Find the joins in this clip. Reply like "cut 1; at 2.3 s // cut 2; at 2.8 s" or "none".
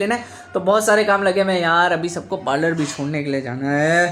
none